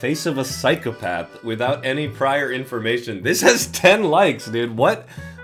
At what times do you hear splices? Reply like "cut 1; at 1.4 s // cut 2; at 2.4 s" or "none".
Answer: none